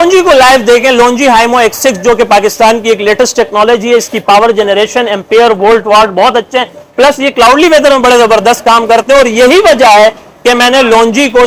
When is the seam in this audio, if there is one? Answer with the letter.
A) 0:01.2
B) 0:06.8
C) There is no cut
C